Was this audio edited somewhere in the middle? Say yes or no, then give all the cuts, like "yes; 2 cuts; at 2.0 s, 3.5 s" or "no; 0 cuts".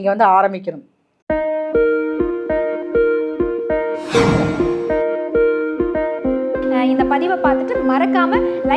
yes; 1 cut; at 1.1 s